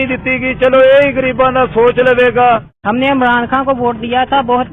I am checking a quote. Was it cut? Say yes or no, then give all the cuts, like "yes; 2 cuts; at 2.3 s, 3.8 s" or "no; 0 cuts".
yes; 1 cut; at 2.7 s